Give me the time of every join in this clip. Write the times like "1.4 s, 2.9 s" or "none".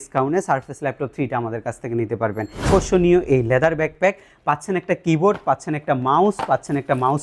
2.6 s